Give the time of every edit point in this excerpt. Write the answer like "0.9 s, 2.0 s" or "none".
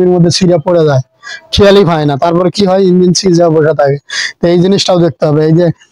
none